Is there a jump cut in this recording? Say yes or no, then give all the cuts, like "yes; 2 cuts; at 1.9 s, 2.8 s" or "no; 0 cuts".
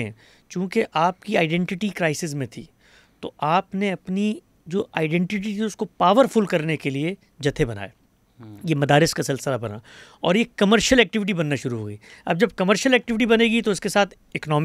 no; 0 cuts